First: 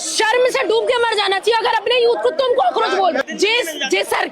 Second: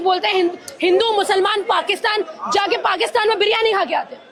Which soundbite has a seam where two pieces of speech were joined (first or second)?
first